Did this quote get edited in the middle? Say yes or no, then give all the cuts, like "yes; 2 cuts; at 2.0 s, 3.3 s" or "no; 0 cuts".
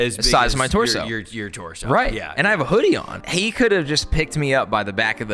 yes; 1 cut; at 3.1 s